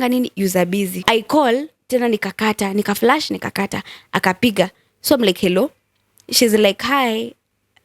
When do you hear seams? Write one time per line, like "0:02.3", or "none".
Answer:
0:01.0